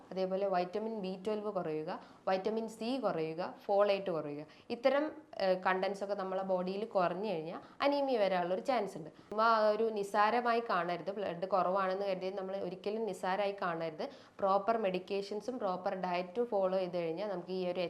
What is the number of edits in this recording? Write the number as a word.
one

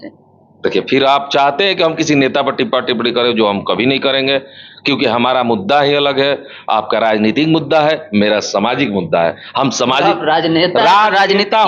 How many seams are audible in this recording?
zero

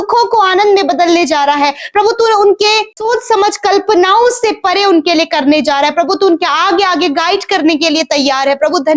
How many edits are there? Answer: one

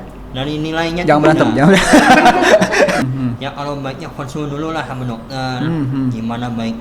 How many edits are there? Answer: one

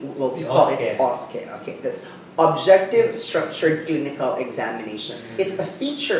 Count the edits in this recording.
one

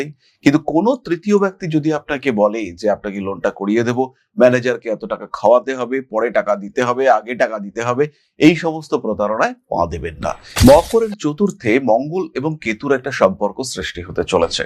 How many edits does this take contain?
one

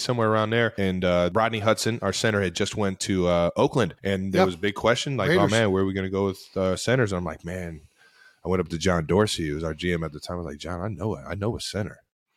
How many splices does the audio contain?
two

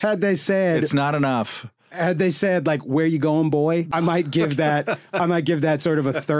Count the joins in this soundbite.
one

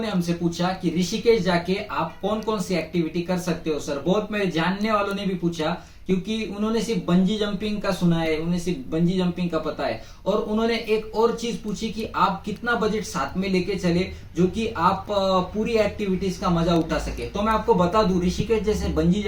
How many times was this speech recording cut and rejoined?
zero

